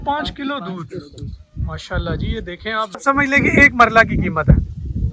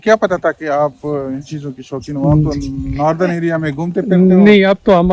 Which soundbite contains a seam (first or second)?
first